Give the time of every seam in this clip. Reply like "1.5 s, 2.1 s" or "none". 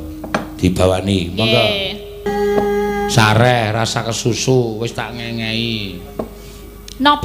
2.3 s